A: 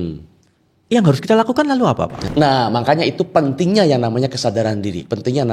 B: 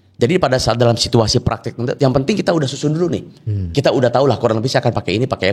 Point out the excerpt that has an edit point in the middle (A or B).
A